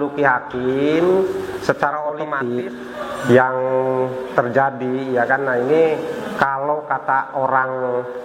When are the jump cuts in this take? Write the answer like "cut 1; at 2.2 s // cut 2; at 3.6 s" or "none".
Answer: cut 1; at 2.4 s